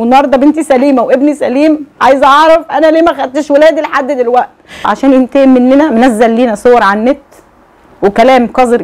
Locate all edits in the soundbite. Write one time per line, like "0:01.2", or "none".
0:04.8

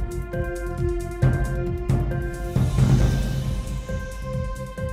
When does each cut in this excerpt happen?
0:04.0

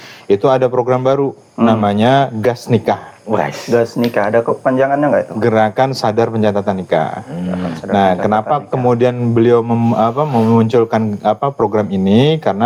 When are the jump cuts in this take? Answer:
none

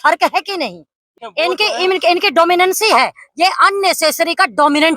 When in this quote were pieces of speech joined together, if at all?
0:01.2

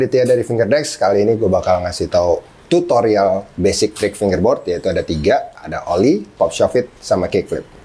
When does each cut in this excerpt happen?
none

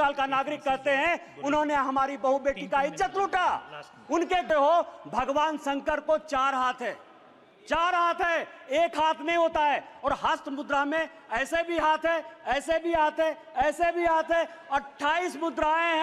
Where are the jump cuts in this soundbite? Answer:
0:04.4

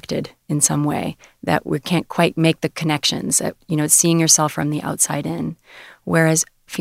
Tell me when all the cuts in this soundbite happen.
0:03.6

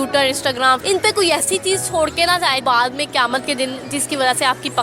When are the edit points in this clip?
0:00.8
0:02.6

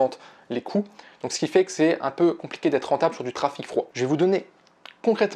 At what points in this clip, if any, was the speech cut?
0:03.9

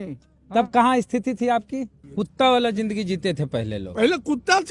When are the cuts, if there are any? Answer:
0:02.0

